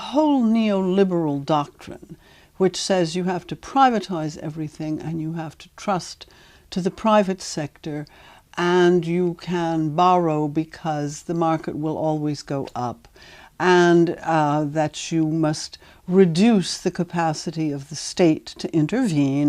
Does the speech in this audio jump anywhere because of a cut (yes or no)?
yes